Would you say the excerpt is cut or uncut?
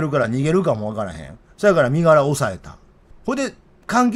uncut